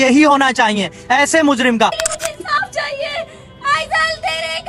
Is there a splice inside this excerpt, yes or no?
yes